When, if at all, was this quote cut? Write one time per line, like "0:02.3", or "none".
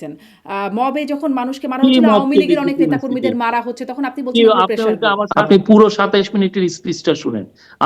0:05.3